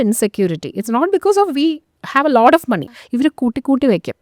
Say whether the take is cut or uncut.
cut